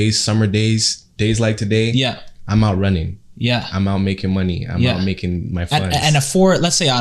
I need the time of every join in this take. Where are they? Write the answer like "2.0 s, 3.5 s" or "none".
none